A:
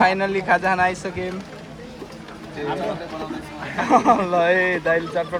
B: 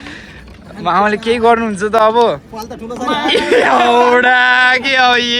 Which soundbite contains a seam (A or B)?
B